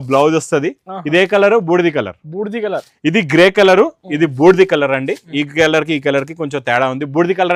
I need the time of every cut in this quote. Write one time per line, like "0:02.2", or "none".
none